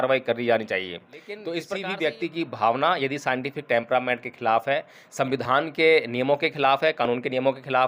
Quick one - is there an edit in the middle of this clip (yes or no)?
yes